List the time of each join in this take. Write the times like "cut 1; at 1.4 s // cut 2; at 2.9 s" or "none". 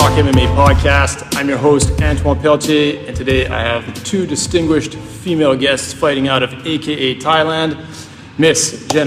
none